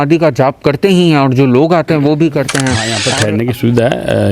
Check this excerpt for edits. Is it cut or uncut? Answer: cut